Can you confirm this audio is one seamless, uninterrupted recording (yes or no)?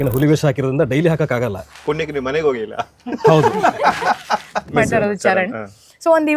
no